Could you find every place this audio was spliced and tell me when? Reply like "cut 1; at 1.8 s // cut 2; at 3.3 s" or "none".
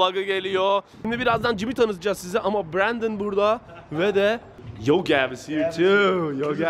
cut 1; at 1.0 s // cut 2; at 4.5 s

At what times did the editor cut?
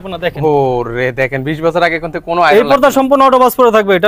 none

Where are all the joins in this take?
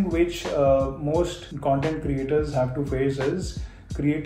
cut 1; at 1.4 s

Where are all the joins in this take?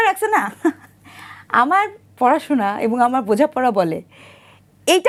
none

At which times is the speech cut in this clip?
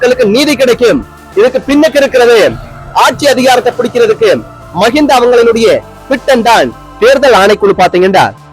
cut 1; at 6.8 s

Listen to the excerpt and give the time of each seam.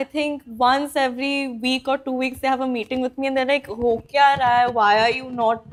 none

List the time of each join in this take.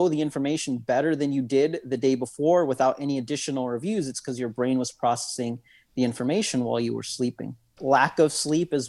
cut 1; at 7.7 s

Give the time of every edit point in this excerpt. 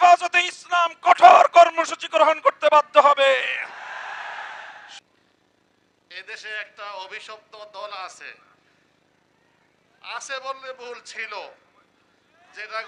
none

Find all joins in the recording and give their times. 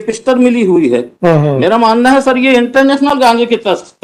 none

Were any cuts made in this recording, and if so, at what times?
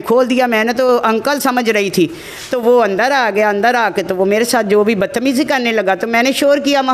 none

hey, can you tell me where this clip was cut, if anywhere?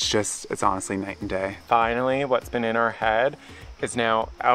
cut 1; at 1.6 s

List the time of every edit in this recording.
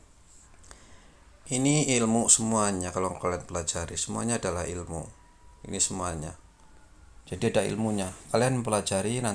cut 1; at 7.1 s

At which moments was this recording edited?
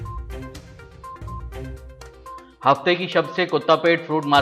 cut 1; at 0.7 s // cut 2; at 2.3 s

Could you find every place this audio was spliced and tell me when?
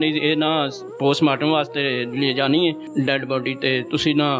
cut 1; at 2.8 s

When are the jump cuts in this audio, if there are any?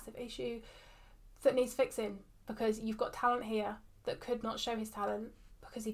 none

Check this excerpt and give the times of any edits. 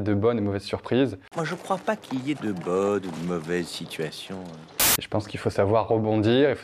none

